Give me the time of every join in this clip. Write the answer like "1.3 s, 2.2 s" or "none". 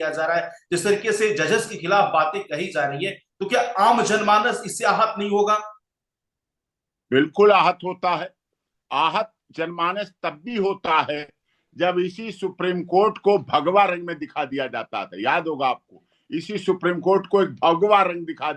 none

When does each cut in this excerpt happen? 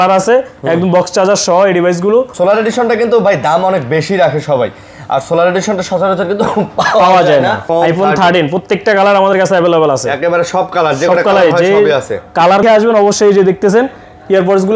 2.3 s, 7.6 s, 12.6 s

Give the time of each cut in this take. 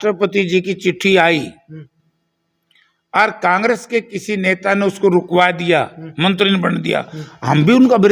none

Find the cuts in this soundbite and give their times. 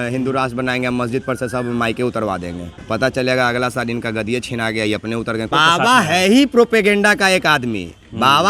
2.7 s, 5.5 s

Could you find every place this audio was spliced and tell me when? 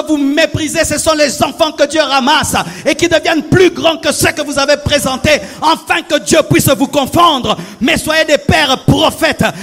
none

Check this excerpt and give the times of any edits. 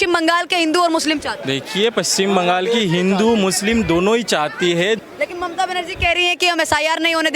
1.3 s, 5.0 s

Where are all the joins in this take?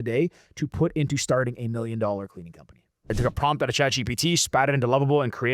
3.0 s

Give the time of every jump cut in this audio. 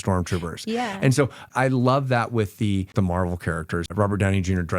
1.5 s, 2.9 s, 3.9 s

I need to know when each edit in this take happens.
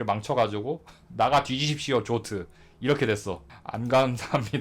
3.5 s

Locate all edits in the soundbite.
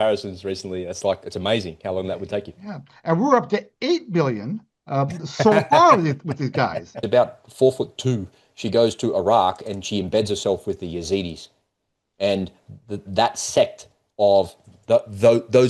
6.9 s

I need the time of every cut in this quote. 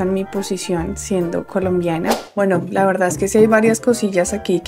2.2 s

